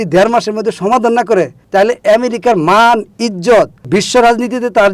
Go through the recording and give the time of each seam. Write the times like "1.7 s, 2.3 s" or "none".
3.9 s